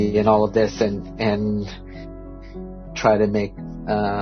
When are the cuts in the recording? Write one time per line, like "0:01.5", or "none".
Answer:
none

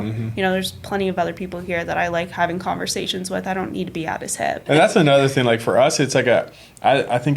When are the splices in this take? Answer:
0:04.7

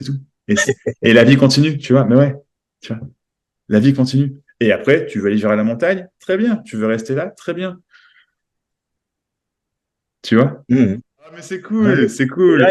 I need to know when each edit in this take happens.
0:11.7

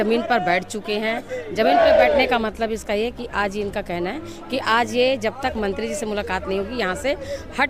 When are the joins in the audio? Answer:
none

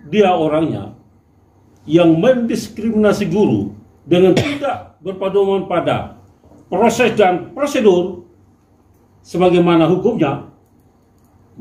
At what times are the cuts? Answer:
none

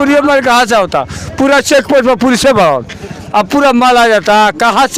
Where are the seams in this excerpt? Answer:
none

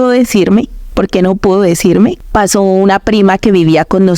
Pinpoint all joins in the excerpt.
0:02.2

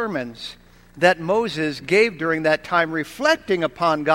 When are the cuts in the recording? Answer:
none

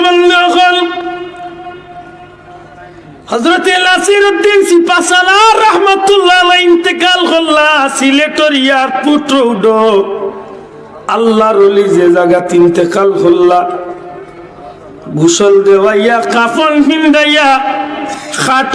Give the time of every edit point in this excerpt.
0:01.0

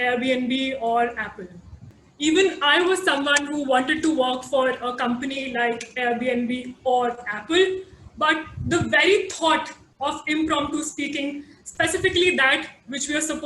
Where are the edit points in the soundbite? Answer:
0:01.8

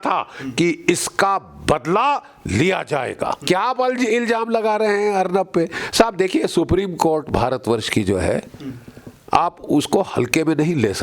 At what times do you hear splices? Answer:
0:03.4

